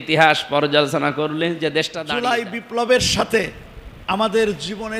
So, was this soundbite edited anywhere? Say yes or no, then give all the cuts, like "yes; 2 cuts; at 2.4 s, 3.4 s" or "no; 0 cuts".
yes; 1 cut; at 2.0 s